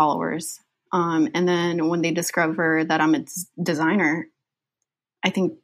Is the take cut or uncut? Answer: uncut